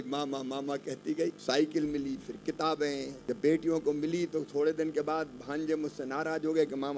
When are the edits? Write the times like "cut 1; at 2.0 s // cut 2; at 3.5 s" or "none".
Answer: cut 1; at 1.4 s // cut 2; at 3.1 s